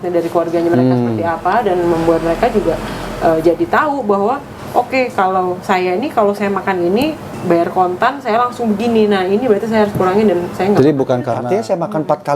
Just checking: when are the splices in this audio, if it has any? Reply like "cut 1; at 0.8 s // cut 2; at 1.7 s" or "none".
cut 1; at 11.4 s